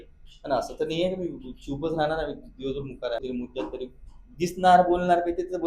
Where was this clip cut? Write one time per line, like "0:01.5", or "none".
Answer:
0:03.2